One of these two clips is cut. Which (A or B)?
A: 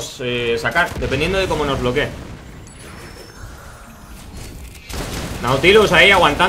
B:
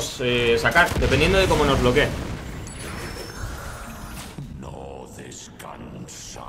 A